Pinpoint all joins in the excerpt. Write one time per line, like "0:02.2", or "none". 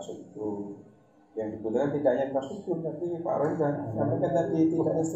none